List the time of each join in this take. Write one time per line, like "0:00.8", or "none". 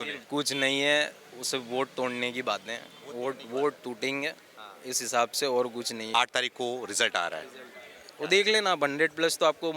0:06.0